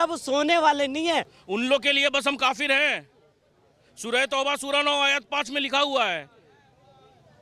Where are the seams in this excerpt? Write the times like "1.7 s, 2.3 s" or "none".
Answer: 1.4 s